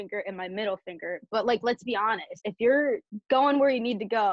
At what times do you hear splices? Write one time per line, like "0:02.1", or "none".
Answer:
0:02.3
0:03.1